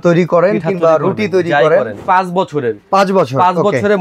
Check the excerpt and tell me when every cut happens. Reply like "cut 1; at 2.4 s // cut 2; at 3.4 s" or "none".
cut 1; at 1.9 s